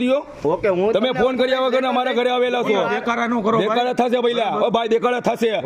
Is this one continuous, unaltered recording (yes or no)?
yes